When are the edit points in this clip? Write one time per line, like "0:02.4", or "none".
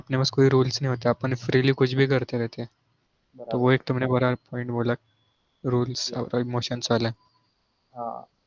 none